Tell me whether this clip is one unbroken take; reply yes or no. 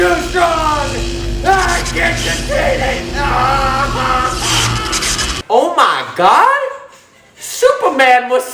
no